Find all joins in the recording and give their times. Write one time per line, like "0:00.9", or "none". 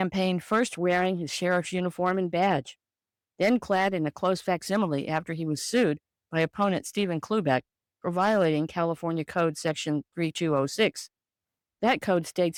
none

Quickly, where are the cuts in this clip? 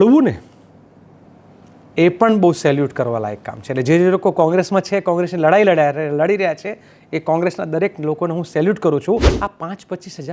0:09.4

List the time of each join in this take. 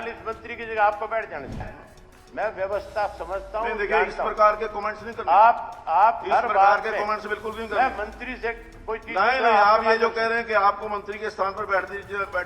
0:01.7

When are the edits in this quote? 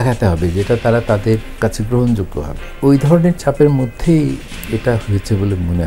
0:01.5
0:02.6

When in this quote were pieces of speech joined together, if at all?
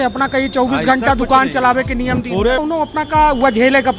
0:02.6

